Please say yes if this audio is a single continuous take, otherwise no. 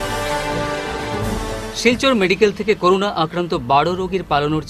yes